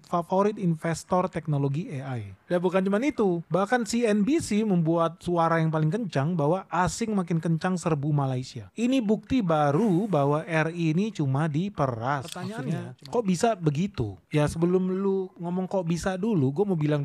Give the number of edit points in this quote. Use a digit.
1